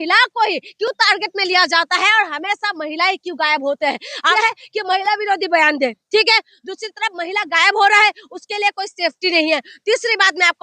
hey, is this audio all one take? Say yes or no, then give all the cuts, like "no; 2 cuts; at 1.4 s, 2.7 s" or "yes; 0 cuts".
no; 1 cut; at 4.3 s